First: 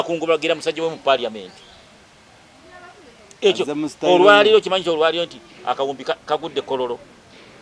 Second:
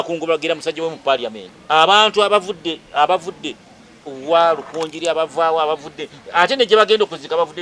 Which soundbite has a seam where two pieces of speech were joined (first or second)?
second